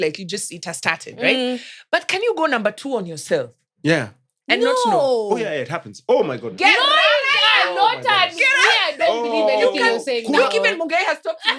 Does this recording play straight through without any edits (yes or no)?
yes